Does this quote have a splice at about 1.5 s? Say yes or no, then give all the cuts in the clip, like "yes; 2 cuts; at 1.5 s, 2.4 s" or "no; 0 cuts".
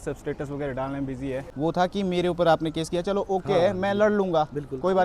yes; 1 cut; at 1.5 s